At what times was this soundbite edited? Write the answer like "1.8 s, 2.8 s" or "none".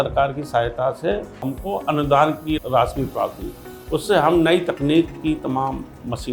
1.5 s, 2.6 s